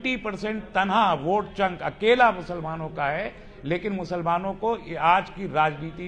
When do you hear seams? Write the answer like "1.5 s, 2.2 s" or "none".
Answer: none

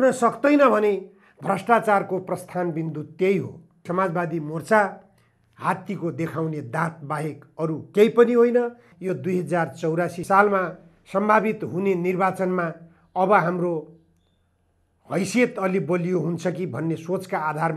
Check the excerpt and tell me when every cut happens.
3.9 s, 8.9 s

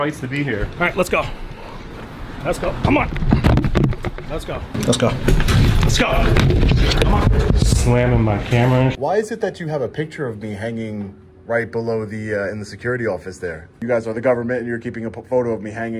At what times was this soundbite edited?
4.7 s, 9.0 s, 13.8 s

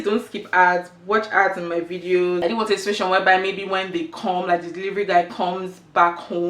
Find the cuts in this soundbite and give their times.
2.4 s

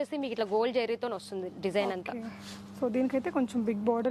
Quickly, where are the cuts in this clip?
none

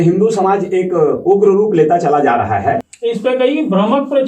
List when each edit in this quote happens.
2.9 s

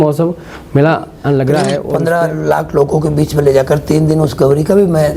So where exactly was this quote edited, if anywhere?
1.9 s

